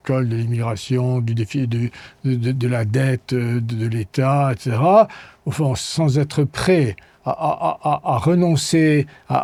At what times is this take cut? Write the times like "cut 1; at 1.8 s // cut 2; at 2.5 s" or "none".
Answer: none